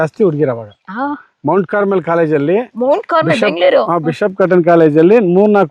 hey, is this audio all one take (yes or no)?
yes